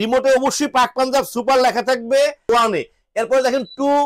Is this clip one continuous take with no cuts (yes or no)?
no